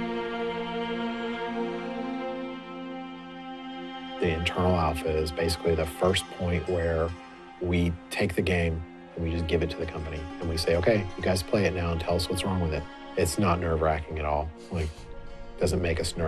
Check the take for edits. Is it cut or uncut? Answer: uncut